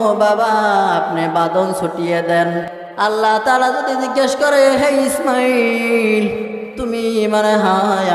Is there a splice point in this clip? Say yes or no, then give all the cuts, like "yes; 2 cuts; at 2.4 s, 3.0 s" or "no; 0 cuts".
no; 0 cuts